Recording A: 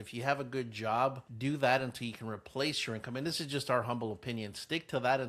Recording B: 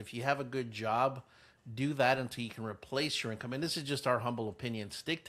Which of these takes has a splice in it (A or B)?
A